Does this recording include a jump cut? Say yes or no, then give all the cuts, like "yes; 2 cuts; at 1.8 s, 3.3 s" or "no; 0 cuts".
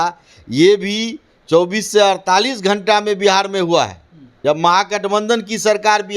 yes; 1 cut; at 4.4 s